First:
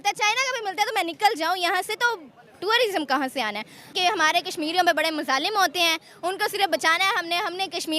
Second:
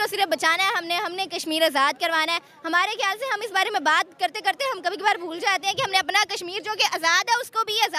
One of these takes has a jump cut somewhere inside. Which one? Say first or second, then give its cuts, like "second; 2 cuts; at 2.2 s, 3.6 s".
first; 1 cut; at 3.9 s